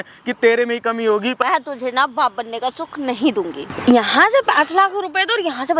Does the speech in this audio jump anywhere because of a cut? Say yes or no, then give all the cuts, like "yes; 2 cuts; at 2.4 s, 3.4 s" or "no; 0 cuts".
yes; 2 cuts; at 1.4 s, 3.6 s